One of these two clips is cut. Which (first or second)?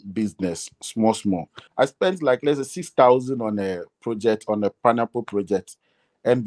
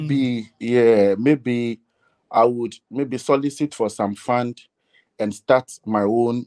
first